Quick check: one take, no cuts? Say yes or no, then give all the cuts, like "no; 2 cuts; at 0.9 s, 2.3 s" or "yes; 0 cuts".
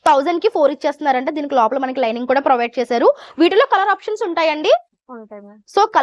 yes; 0 cuts